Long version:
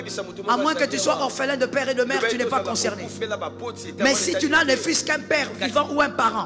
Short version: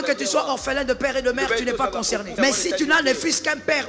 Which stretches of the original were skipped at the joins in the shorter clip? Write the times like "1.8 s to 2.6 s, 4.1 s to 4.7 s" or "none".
3.0 s to 3.9 s